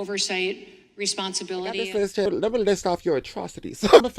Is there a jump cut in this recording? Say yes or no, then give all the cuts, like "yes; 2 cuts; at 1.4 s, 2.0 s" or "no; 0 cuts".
yes; 1 cut; at 1.8 s